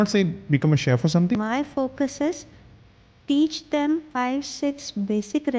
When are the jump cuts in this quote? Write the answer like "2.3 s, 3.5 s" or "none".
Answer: 1.4 s, 4.1 s